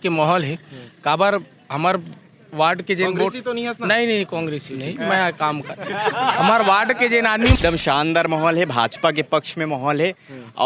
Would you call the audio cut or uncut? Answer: cut